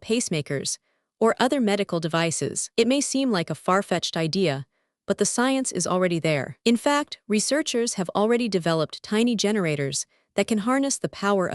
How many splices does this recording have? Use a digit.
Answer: 0